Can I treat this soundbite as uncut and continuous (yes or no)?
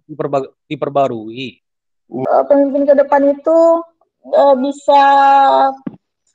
no